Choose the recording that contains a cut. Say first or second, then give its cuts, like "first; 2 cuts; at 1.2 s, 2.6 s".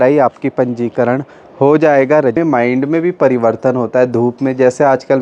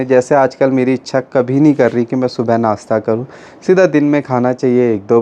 first; 1 cut; at 2.4 s